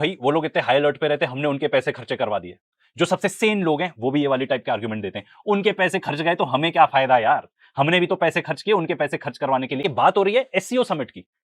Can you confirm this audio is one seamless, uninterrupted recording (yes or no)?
no